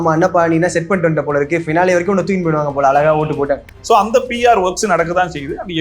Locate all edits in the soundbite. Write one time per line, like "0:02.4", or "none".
0:03.7